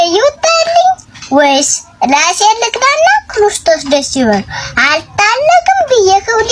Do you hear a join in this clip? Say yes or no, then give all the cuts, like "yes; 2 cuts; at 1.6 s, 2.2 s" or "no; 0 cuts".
no; 0 cuts